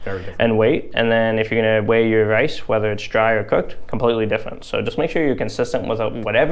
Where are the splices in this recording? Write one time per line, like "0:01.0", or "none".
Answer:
none